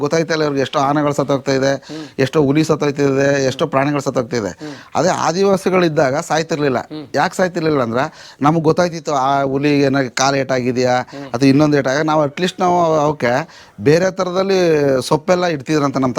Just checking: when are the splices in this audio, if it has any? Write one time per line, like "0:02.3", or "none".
none